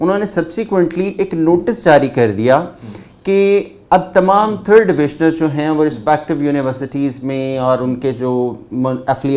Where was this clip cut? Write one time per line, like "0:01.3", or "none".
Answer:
none

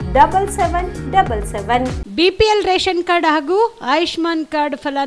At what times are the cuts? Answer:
0:02.0

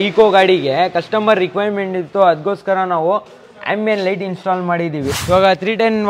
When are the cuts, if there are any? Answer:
0:05.2

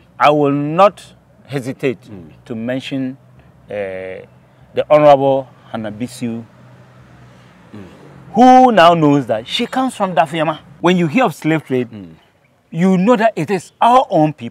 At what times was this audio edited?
0:10.7

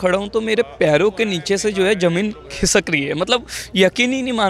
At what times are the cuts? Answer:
none

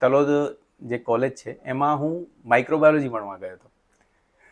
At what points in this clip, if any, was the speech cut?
none

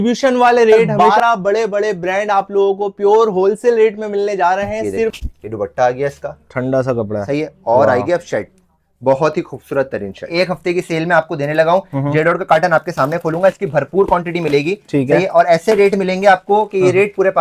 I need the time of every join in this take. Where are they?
0:00.9
0:05.2
0:10.2

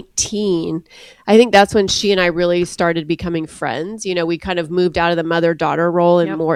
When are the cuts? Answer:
none

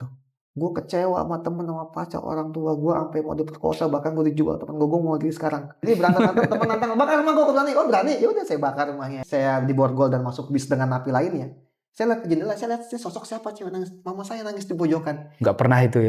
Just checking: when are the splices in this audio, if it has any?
0:05.8
0:09.1

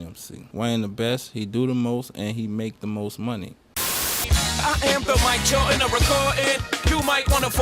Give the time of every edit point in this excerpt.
0:03.7

